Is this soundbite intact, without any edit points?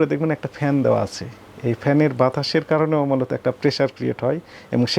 yes; 0 cuts

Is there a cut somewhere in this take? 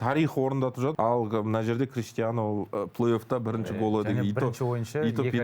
yes; 1 cut; at 0.9 s

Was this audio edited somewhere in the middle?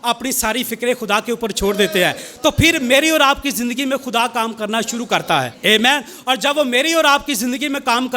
yes; 1 cut; at 5.5 s

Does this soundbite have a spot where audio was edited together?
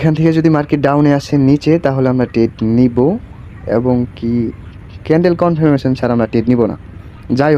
no; 0 cuts

